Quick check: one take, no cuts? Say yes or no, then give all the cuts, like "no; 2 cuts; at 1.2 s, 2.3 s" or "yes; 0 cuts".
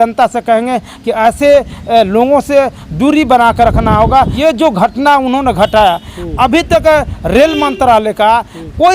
no; 1 cut; at 4.3 s